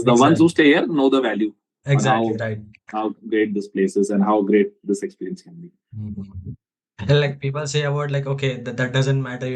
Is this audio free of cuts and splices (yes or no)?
yes